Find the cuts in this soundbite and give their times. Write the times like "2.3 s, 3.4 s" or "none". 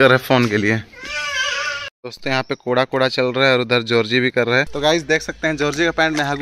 1.9 s, 4.7 s